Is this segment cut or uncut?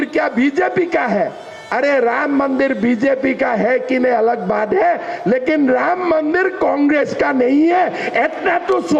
uncut